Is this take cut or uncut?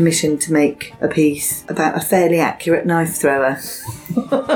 cut